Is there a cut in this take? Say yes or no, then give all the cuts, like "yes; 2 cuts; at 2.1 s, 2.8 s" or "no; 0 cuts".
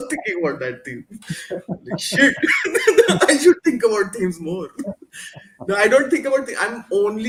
no; 0 cuts